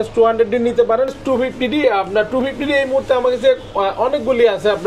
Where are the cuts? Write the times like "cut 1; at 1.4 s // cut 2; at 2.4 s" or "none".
cut 1; at 1.2 s